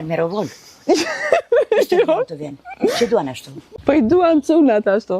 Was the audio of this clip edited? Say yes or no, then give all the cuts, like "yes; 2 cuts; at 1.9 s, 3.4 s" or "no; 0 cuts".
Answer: yes; 1 cut; at 3.7 s